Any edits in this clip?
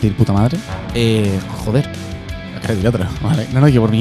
no; 0 cuts

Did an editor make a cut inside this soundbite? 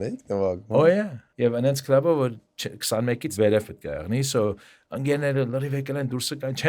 yes; 2 cuts; at 1.2 s, 3.3 s

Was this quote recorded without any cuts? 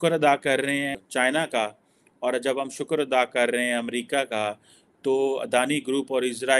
no; 1 cut; at 1.0 s

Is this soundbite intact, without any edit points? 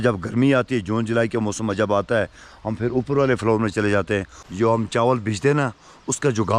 no; 1 cut; at 4.4 s

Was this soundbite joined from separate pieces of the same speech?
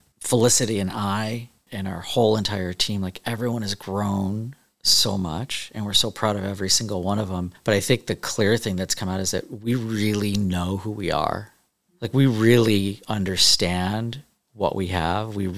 no; 0 cuts

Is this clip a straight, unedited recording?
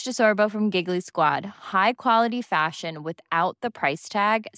yes; 0 cuts

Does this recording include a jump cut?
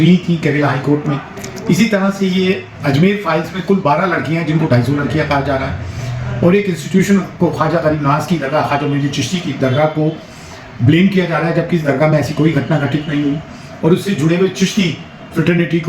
no; 0 cuts

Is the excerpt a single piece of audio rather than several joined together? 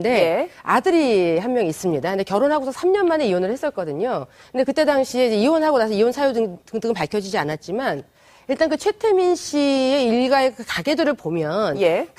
yes; 0 cuts

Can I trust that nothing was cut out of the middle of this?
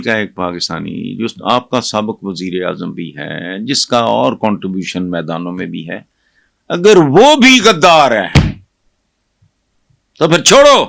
yes; 0 cuts

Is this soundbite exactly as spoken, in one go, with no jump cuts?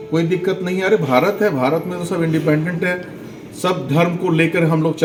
yes; 0 cuts

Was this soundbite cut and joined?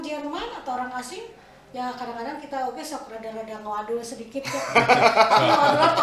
no; 0 cuts

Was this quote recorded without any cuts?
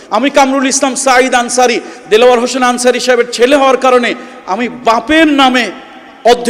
yes; 0 cuts

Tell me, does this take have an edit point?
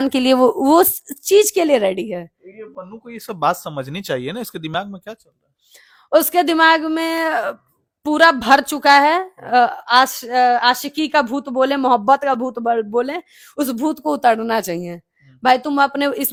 no; 0 cuts

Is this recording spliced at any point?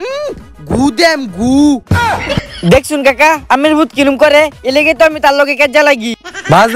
no; 0 cuts

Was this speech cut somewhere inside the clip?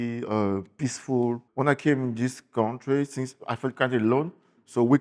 yes; 1 cut; at 1.4 s

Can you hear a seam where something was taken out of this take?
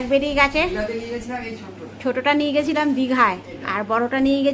no; 0 cuts

